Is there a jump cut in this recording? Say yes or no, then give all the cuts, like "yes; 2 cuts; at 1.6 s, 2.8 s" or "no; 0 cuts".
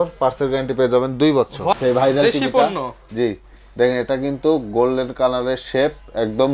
yes; 1 cut; at 1.7 s